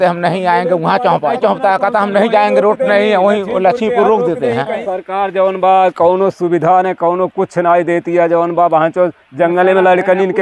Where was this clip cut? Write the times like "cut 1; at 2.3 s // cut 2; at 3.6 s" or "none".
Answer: cut 1; at 1.4 s // cut 2; at 4.8 s